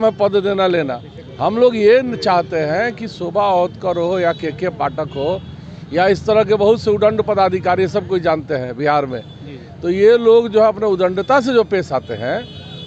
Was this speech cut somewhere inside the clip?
no; 0 cuts

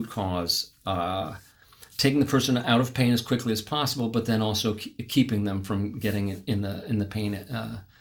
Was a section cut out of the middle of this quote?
no; 0 cuts

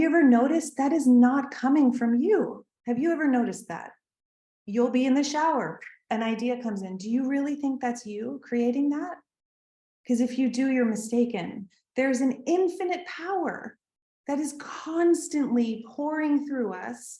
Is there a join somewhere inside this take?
no; 0 cuts

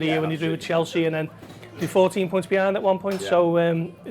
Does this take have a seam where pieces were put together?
no; 0 cuts

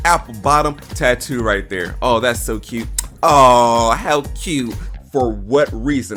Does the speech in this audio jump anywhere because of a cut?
yes; 1 cut; at 4.8 s

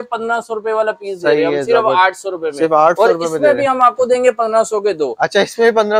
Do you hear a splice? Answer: no; 0 cuts

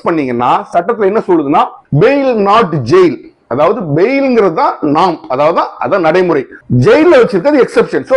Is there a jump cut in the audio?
no; 0 cuts

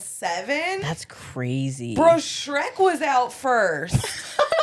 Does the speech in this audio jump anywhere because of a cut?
no; 0 cuts

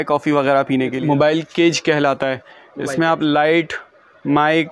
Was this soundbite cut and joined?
yes; 1 cut; at 1.0 s

